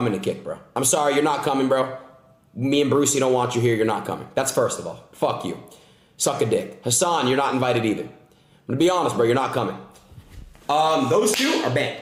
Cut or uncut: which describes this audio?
uncut